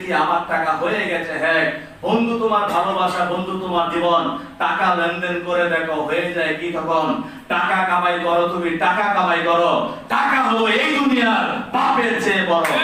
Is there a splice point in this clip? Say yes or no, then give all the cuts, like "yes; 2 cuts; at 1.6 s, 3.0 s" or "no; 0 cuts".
no; 0 cuts